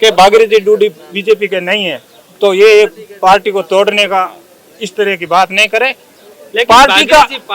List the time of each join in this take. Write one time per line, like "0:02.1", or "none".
none